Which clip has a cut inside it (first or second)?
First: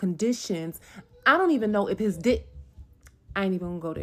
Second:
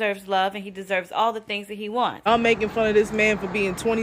second